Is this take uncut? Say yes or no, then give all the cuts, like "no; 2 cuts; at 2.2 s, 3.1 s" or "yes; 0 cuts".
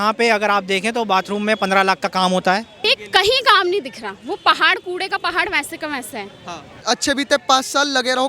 no; 2 cuts; at 2.8 s, 6.8 s